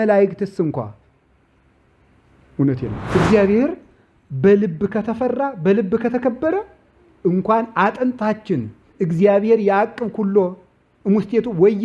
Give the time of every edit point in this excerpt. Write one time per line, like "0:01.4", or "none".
0:03.2